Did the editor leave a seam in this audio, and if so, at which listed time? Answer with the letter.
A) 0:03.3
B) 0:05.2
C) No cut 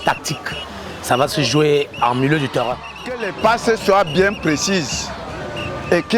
A